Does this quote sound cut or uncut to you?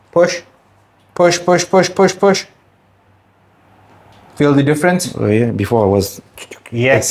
uncut